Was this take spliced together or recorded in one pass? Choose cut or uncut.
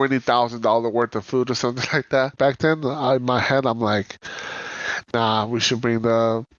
cut